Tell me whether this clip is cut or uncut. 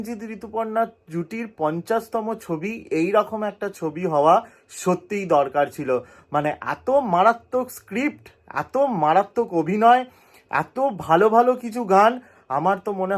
uncut